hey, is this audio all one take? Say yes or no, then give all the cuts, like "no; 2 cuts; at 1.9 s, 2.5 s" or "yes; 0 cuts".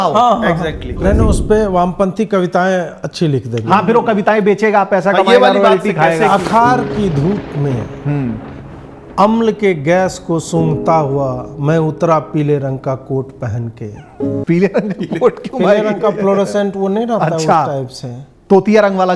no; 1 cut; at 1.0 s